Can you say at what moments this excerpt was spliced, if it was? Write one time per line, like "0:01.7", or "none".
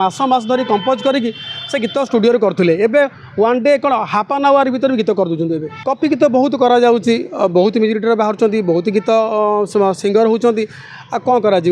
0:05.7